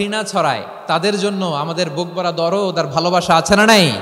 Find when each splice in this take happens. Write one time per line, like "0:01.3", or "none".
none